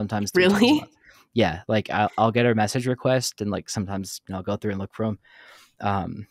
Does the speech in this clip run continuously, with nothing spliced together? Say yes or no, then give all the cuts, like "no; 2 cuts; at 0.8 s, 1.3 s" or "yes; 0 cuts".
yes; 0 cuts